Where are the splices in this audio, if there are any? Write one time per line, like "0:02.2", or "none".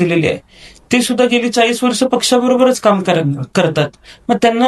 none